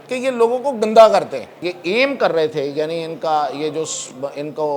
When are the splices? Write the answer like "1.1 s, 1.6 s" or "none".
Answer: 1.5 s